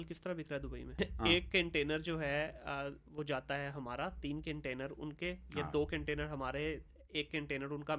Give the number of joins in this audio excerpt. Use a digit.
1